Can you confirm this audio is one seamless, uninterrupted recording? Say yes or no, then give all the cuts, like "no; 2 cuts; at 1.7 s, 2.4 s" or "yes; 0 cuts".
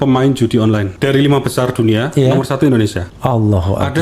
no; 2 cuts; at 0.9 s, 3.1 s